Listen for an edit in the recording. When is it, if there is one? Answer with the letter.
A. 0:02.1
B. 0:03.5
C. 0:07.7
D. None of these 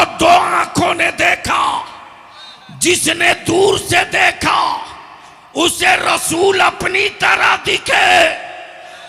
D